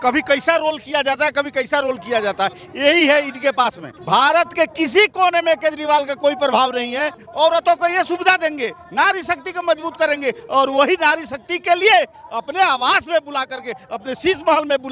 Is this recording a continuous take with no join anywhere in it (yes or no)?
no